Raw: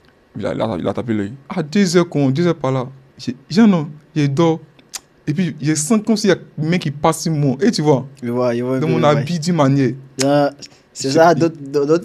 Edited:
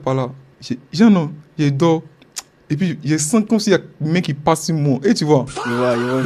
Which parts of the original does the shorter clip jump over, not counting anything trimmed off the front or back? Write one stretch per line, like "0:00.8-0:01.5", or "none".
none